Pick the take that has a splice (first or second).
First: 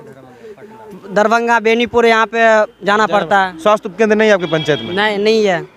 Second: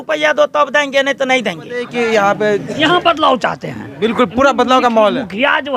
second